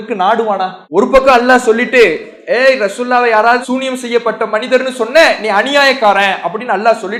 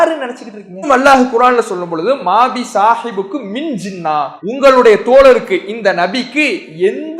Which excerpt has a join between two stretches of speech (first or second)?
second